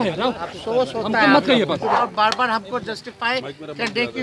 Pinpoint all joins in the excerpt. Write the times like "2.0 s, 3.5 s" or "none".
2.0 s